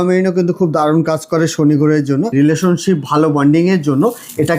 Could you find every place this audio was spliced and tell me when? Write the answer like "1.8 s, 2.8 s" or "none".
2.3 s